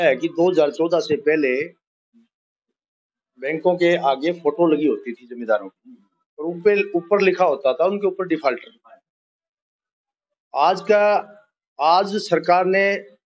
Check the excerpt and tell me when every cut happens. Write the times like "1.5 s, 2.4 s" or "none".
none